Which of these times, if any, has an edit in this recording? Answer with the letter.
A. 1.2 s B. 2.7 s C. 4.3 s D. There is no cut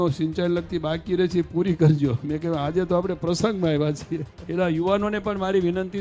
C